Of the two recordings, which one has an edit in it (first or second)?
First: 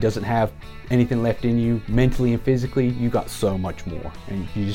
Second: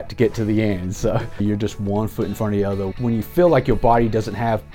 second